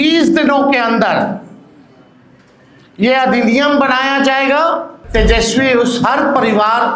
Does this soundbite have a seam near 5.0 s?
yes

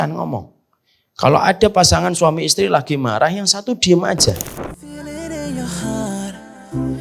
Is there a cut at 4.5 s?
yes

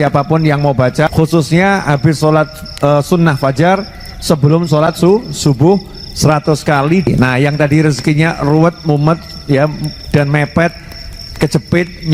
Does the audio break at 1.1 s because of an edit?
yes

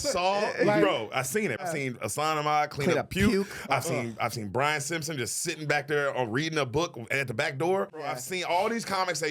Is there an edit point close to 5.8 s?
no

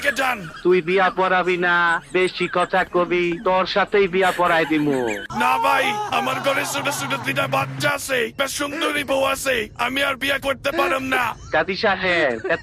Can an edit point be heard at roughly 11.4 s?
yes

